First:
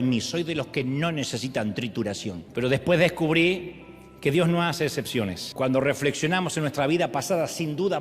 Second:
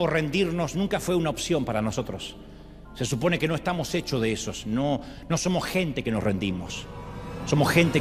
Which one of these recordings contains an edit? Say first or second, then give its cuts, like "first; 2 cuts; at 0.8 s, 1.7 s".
first; 2 cuts; at 2.4 s, 5.4 s